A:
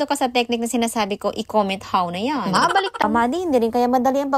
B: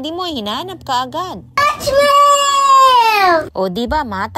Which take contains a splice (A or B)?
A